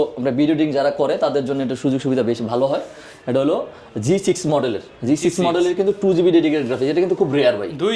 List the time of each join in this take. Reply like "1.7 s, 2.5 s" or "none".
none